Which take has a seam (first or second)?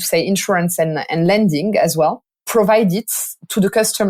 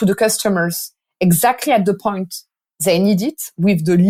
first